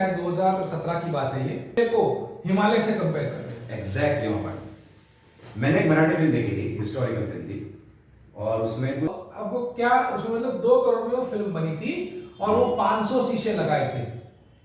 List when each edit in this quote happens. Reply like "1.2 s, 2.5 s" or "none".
1.8 s, 9.1 s